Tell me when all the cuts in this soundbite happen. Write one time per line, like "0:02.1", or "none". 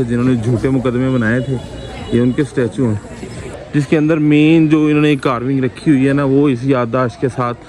0:03.5